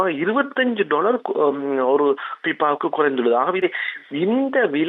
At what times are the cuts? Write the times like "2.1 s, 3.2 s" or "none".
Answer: 3.6 s